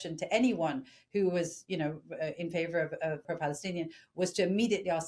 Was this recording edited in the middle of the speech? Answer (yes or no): yes